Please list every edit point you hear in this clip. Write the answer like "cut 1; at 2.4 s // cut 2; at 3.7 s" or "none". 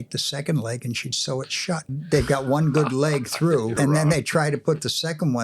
cut 1; at 1.9 s // cut 2; at 3.7 s